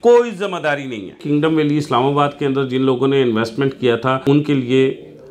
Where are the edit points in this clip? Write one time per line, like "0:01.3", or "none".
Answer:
0:01.2
0:04.2